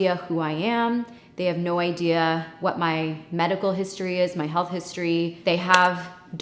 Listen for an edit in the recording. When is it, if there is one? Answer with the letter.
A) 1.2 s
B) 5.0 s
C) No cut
C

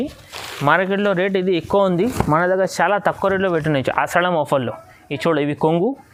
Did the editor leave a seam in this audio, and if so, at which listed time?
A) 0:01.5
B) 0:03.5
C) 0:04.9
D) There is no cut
D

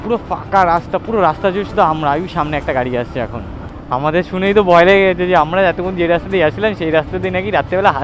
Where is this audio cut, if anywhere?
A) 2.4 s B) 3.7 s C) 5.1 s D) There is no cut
B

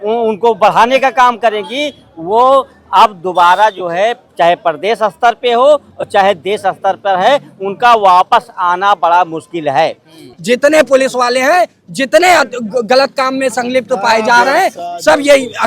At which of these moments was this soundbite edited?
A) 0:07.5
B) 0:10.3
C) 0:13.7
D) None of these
B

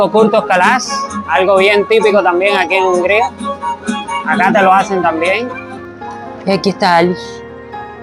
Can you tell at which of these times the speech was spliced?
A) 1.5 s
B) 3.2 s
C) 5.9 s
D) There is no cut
C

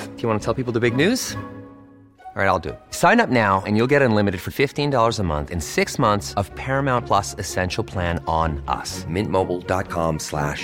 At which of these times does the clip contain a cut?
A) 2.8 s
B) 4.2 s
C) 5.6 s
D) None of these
D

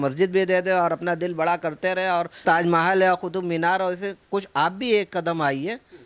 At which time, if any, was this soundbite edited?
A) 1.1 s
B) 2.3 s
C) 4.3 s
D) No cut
B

